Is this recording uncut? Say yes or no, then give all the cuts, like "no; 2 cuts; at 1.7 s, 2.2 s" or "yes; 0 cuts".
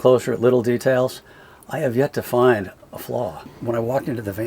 no; 1 cut; at 3.3 s